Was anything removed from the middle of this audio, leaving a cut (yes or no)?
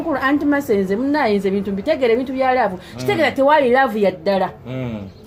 no